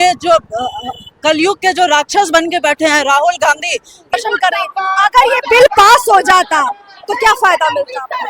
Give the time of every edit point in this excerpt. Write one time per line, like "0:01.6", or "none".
0:04.1

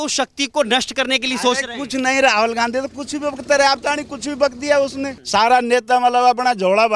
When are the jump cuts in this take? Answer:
0:05.1

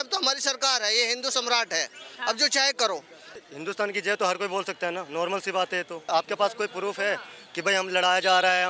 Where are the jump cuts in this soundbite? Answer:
0:03.4
0:06.1

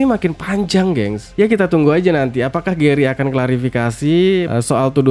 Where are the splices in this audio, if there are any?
none

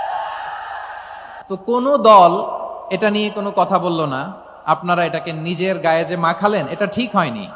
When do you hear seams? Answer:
0:01.3

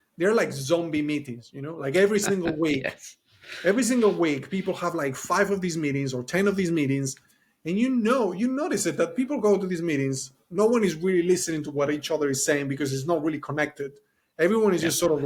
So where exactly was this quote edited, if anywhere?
none

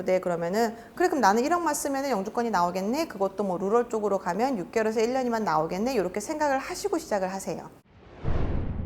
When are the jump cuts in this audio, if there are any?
0:07.7

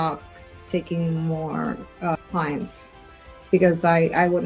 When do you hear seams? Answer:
none

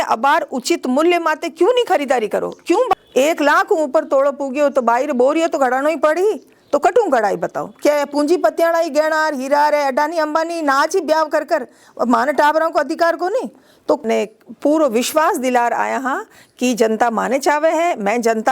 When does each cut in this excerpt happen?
0:02.9
0:14.0

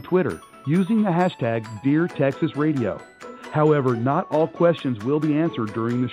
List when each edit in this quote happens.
none

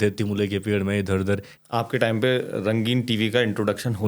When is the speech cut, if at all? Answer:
0:01.5

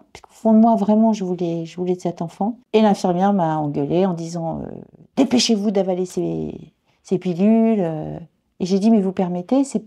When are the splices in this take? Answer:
0:02.6

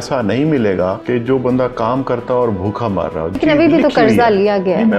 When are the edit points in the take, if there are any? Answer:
0:01.0
0:03.4

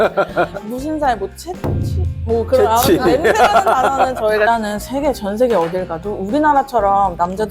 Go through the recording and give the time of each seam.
0:04.5

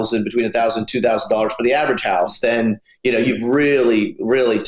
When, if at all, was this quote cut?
0:02.4

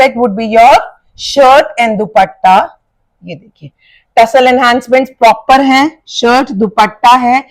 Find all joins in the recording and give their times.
none

